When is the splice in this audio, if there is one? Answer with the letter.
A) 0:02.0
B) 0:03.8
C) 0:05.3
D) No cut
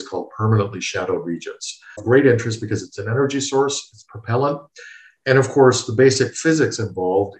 A